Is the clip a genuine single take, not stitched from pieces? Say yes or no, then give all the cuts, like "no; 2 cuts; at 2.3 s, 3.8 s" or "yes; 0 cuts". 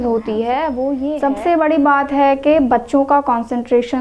no; 1 cut; at 1.0 s